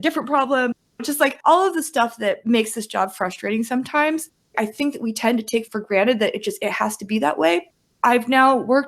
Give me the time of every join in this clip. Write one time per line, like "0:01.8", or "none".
none